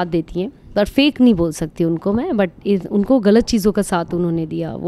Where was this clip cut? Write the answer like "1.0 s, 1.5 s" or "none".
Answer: none